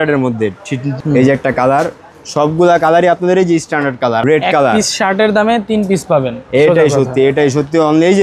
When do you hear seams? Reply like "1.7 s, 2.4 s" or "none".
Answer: 0.9 s, 4.2 s